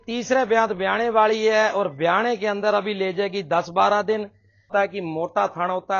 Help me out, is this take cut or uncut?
cut